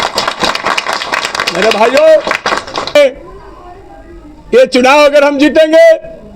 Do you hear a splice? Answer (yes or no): yes